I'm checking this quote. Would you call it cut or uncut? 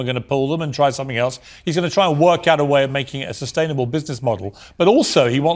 uncut